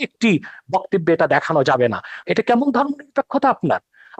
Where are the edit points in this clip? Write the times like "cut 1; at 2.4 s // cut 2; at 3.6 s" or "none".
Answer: cut 1; at 2.2 s